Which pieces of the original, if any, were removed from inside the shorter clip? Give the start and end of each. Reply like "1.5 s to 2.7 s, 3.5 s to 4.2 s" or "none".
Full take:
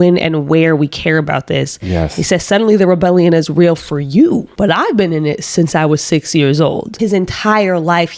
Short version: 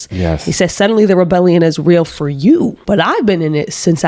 none